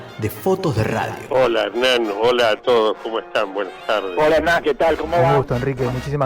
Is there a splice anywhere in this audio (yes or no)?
no